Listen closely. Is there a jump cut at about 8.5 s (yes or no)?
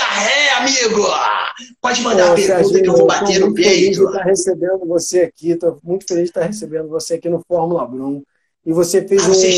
no